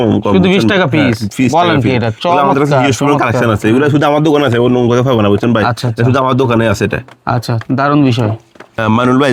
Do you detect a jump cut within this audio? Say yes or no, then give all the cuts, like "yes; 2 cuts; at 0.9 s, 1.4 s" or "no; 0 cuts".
no; 0 cuts